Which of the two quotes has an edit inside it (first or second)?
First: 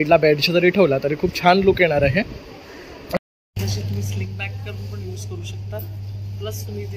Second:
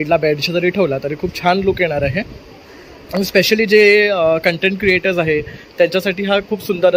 first